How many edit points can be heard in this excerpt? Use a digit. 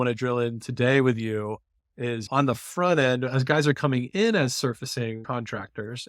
2